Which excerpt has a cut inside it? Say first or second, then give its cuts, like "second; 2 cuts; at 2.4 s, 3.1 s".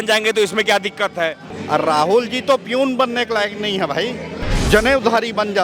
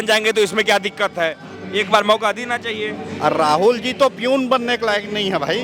first; 2 cuts; at 1.5 s, 4.5 s